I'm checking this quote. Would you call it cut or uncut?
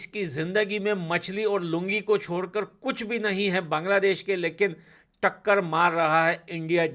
uncut